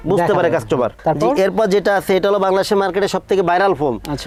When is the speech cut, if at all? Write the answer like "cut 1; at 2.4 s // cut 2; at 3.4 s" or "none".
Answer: none